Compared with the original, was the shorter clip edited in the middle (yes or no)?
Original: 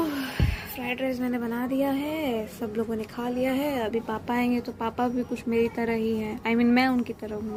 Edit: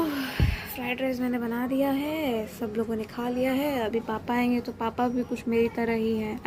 no